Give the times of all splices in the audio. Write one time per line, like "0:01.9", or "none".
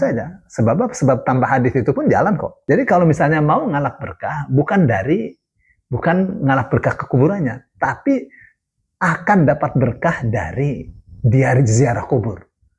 0:02.5